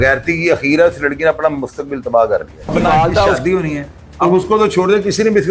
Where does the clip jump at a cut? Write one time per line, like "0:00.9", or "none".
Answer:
0:02.7